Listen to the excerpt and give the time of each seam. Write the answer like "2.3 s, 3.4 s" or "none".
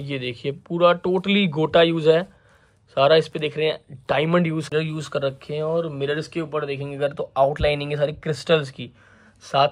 4.7 s